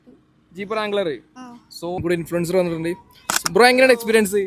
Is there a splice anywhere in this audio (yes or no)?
yes